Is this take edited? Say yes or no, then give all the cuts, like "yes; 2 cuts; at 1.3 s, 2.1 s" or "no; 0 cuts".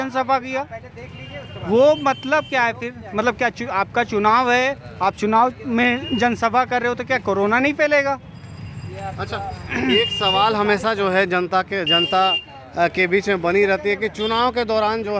no; 0 cuts